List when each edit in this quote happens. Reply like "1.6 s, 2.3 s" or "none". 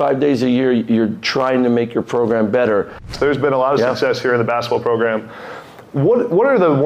3.1 s